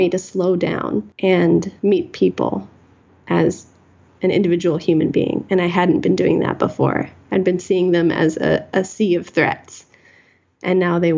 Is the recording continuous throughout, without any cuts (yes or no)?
no